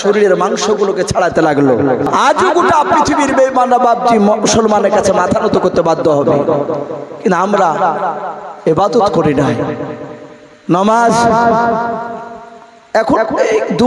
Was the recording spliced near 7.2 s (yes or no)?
no